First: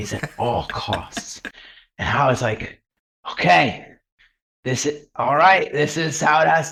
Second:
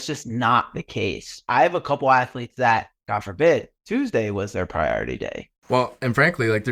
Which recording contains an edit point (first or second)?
second